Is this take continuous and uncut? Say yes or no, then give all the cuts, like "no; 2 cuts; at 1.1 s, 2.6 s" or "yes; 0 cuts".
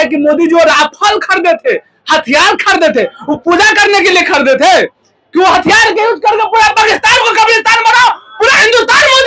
yes; 0 cuts